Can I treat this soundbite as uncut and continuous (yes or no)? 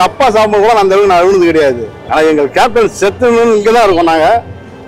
no